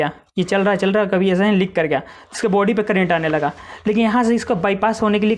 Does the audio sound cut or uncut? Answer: uncut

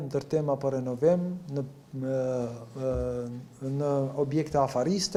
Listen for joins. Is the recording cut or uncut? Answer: uncut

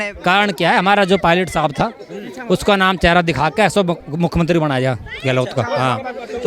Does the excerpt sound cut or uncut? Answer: uncut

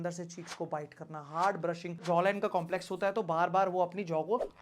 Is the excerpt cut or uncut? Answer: cut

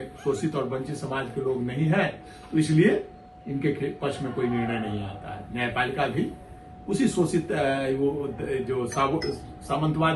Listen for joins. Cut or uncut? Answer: uncut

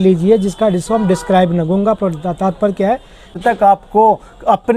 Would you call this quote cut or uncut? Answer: cut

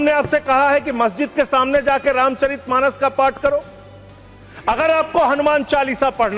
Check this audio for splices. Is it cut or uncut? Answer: uncut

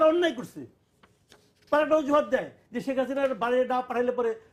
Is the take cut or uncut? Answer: uncut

